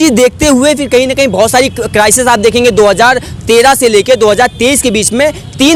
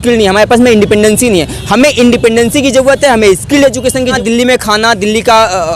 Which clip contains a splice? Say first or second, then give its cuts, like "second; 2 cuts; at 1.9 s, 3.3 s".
second; 1 cut; at 4.2 s